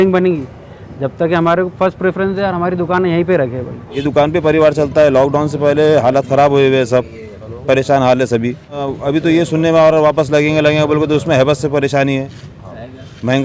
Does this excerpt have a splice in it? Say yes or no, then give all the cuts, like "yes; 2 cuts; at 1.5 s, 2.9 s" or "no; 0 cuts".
yes; 2 cuts; at 4.0 s, 8.9 s